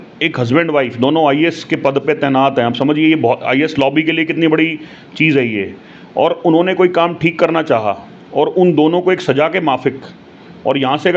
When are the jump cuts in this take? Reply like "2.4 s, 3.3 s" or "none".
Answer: none